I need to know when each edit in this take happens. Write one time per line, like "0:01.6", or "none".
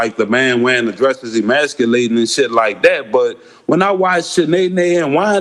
none